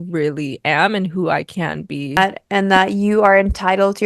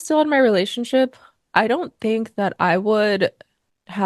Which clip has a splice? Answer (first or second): first